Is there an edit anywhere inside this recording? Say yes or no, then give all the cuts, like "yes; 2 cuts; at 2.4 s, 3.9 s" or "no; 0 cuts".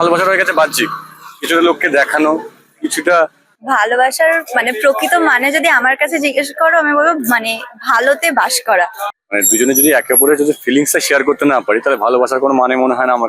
yes; 2 cuts; at 3.6 s, 9.1 s